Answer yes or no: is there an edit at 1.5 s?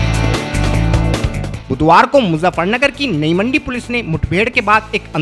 yes